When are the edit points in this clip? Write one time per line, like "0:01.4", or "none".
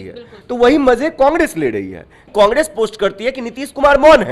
0:02.3